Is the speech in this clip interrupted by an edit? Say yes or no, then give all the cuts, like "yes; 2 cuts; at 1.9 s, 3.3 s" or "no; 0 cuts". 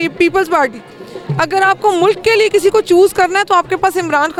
no; 0 cuts